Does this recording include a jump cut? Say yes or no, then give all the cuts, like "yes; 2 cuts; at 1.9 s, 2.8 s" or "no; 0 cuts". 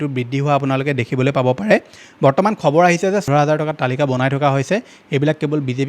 yes; 1 cut; at 3.3 s